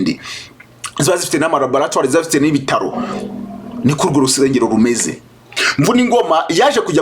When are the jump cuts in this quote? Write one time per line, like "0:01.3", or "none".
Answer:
0:05.6